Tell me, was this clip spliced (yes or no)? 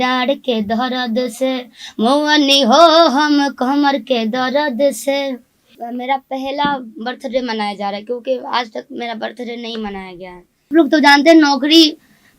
yes